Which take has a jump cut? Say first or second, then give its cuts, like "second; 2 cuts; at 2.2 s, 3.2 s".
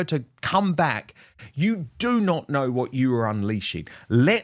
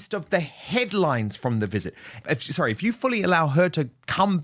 second; 1 cut; at 2.2 s